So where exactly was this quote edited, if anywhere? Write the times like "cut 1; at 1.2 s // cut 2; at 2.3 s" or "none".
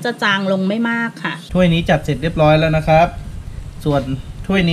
cut 1; at 1.3 s